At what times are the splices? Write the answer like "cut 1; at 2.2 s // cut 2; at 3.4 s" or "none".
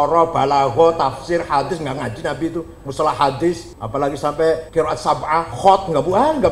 cut 1; at 3.7 s // cut 2; at 4.7 s